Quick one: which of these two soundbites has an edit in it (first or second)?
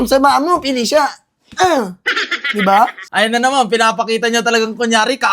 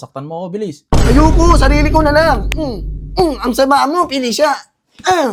first